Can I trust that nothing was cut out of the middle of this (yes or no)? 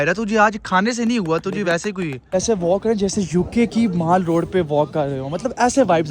no